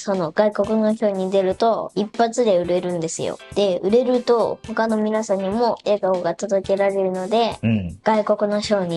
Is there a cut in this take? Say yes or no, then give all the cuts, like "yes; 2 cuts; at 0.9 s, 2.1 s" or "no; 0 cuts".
yes; 4 cuts; at 1.9 s, 3.4 s, 4.6 s, 7.9 s